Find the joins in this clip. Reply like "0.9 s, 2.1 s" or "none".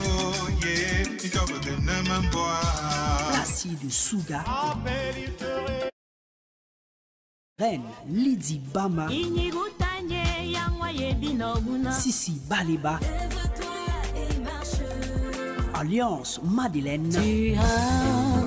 17.5 s